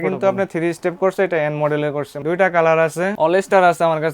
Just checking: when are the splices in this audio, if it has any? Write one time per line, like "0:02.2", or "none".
0:02.1
0:03.1